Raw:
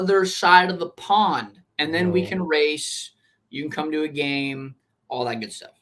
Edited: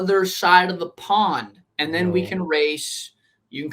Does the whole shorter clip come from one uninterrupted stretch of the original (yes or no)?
yes